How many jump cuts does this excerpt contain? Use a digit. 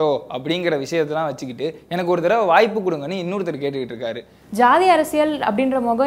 1